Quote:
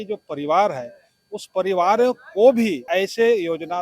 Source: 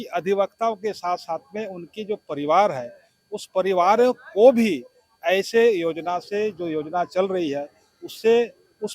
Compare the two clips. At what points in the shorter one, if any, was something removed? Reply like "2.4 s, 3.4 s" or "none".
2.8 s